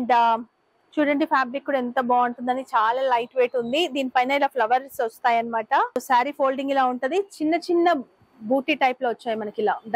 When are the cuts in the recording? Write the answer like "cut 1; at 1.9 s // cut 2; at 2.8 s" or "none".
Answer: cut 1; at 6.0 s